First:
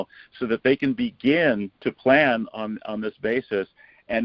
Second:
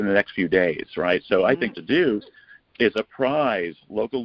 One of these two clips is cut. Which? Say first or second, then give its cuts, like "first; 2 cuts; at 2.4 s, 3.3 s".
first; 1 cut; at 1.7 s